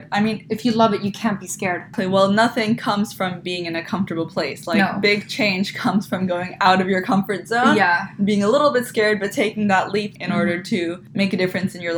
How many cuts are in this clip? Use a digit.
3